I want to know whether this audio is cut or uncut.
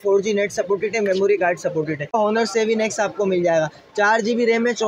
cut